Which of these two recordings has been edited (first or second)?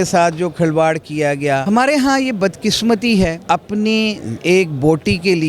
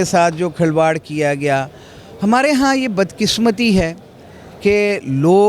first